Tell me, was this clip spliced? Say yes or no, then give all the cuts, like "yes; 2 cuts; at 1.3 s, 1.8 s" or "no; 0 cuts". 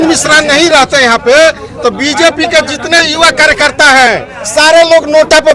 no; 0 cuts